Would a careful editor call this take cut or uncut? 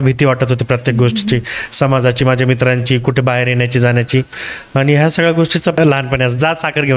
cut